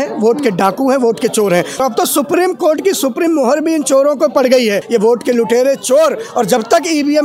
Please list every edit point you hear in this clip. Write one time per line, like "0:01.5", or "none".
0:01.8
0:04.8